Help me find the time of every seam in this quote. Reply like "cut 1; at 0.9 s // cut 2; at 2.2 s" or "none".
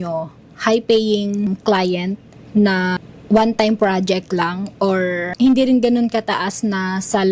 cut 1; at 1.5 s // cut 2; at 2.3 s // cut 3; at 3.0 s // cut 4; at 5.3 s